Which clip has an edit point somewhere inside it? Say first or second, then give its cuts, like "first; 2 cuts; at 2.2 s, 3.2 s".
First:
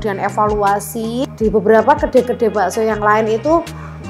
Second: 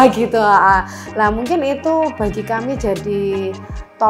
first; 1 cut; at 1.3 s